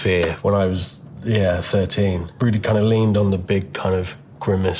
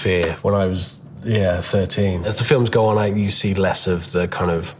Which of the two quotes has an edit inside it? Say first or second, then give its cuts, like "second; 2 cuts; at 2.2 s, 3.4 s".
second; 1 cut; at 2.3 s